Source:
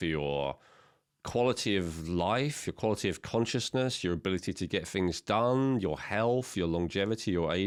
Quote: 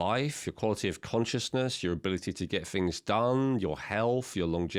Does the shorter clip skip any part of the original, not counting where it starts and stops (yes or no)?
no